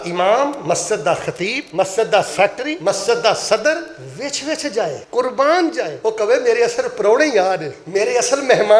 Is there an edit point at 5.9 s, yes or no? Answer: yes